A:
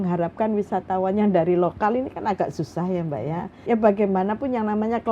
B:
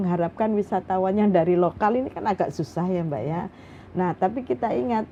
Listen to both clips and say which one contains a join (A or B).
A